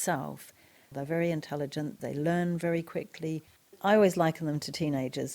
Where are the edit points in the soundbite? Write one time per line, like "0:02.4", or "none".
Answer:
0:00.9
0:02.0
0:03.7